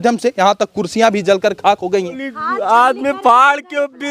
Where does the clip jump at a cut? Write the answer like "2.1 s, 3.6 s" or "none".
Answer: 2.2 s